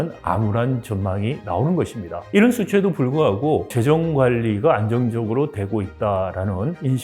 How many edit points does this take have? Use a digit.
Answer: 1